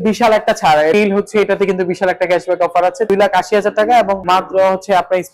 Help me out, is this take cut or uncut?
cut